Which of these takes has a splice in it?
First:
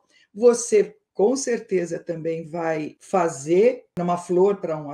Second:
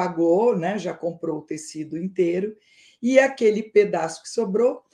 first; 1 cut; at 4.0 s

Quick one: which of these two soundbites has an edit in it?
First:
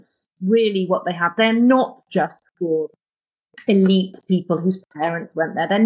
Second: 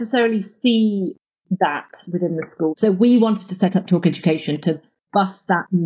second; 1 cut; at 2.7 s

